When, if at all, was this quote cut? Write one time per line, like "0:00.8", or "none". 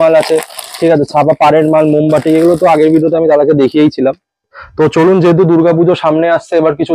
0:04.6